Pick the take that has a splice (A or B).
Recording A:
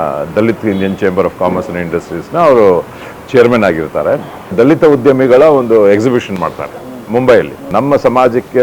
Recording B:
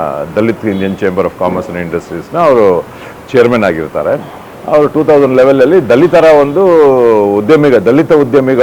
A